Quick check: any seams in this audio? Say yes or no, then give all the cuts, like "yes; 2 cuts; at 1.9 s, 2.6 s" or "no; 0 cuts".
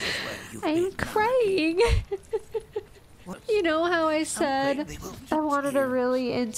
yes; 1 cut; at 3.3 s